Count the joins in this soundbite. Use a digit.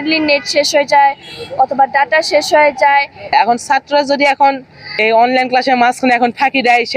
2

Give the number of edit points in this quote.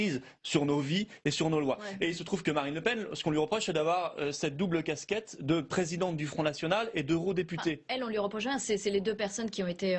1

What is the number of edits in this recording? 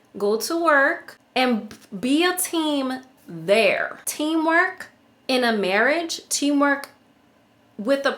2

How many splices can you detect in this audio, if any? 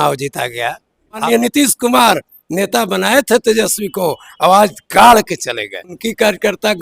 2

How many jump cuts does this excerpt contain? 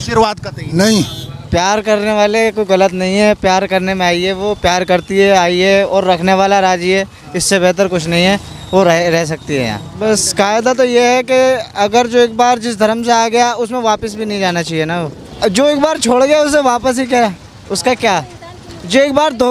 3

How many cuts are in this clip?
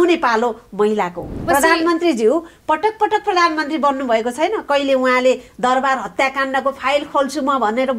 1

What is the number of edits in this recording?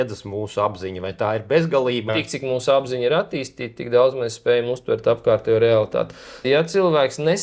2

